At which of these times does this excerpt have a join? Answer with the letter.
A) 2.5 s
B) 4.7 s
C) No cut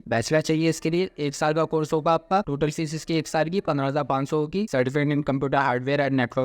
B